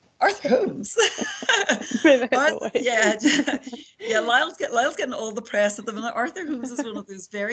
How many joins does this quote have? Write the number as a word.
zero